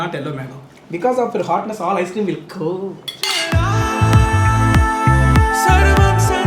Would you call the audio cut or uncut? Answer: uncut